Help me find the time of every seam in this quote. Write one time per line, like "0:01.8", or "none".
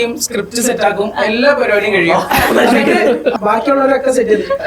0:03.3